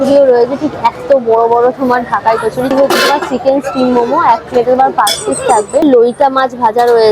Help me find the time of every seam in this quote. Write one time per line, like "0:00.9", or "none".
0:02.7
0:05.8